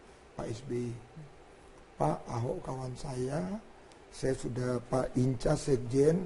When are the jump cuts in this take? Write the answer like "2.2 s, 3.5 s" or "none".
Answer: 1.0 s